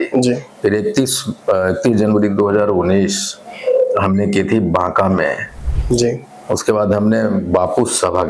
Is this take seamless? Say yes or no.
yes